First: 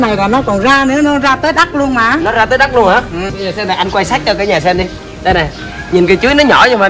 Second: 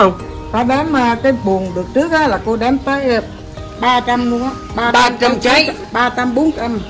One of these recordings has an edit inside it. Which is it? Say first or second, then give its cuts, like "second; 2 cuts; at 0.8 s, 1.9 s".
first; 1 cut; at 3.4 s